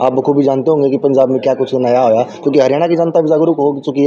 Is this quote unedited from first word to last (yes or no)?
yes